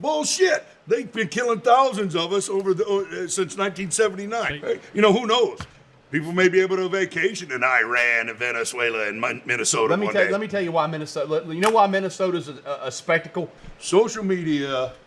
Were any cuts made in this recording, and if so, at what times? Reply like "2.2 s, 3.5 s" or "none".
4.5 s, 13.6 s